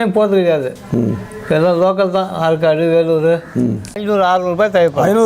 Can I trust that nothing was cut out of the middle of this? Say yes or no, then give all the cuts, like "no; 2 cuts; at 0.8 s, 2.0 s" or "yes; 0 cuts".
no; 1 cut; at 4.0 s